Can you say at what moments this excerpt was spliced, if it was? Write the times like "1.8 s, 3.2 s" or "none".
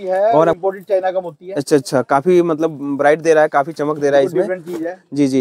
none